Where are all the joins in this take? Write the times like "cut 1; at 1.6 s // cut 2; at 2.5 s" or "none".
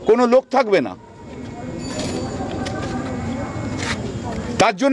none